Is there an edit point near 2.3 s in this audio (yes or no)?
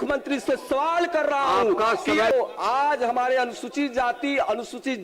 yes